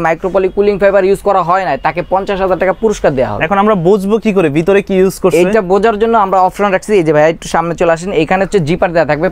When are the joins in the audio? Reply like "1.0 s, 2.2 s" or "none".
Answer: none